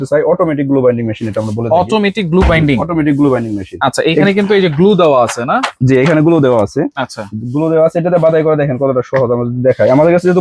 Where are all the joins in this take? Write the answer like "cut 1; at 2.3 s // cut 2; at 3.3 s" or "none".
none